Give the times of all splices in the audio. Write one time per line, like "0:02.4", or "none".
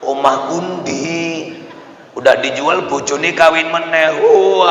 none